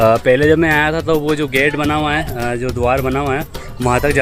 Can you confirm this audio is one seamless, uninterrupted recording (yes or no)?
yes